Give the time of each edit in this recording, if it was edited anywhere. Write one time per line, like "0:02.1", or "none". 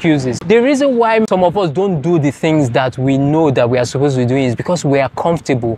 0:01.3